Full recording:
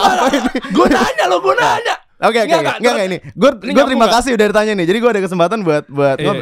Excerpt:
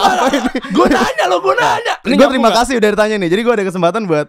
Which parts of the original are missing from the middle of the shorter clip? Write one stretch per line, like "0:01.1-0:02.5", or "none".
0:02.0-0:03.6